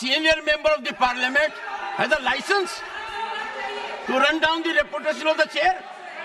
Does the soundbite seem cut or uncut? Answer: uncut